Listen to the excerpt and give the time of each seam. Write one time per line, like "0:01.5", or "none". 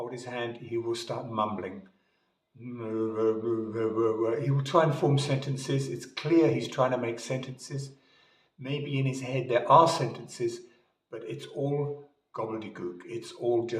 none